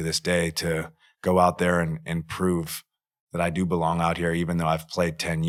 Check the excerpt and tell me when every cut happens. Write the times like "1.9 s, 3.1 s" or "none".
none